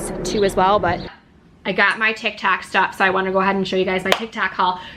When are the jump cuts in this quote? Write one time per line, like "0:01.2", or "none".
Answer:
0:01.2